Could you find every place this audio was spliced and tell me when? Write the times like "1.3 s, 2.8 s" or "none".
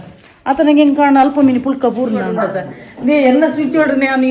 2.4 s